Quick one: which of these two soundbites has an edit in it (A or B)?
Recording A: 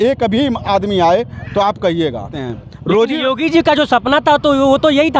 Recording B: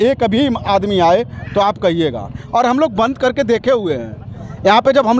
A